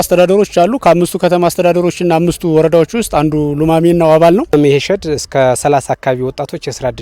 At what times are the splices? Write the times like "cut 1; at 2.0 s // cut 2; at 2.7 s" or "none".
cut 1; at 4.5 s